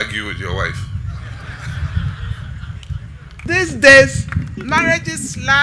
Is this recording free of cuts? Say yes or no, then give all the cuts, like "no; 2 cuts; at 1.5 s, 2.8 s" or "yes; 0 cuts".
no; 1 cut; at 3.5 s